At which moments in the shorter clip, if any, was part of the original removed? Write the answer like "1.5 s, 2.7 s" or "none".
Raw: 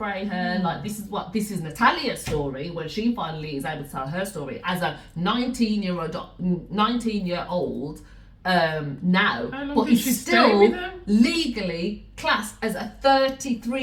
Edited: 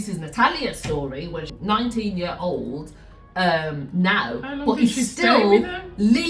1.5 s

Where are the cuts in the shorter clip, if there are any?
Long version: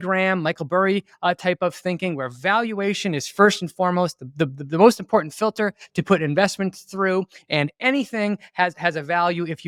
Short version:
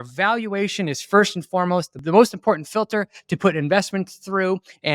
2.0 s

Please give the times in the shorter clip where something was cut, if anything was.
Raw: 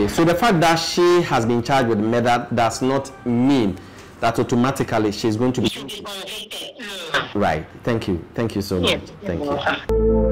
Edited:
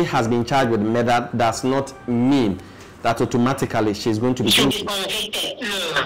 none

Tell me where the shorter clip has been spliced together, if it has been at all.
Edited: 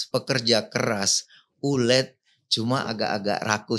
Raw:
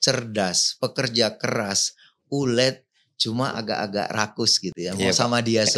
none

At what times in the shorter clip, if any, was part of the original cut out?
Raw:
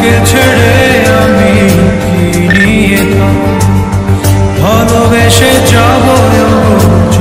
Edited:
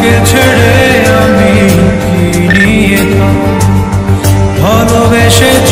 none

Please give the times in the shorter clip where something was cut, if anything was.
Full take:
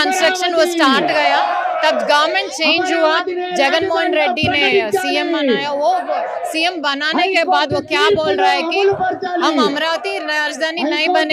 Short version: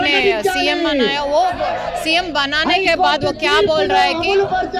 none

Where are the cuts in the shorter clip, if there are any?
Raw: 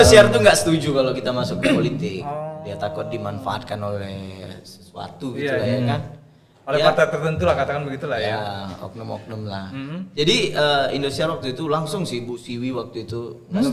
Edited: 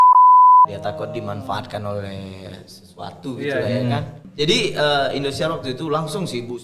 4.2 s

